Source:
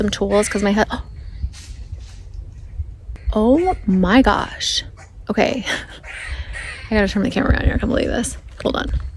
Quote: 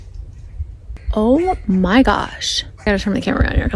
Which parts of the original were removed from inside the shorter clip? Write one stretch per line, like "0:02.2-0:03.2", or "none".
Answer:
0:05.0-0:06.9